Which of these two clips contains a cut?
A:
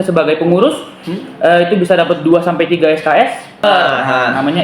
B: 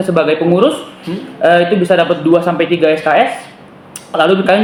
A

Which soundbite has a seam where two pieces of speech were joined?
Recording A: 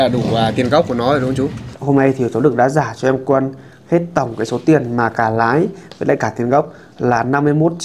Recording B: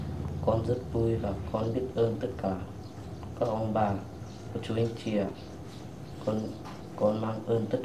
A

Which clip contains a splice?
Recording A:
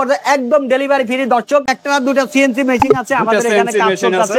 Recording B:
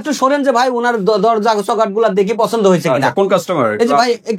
A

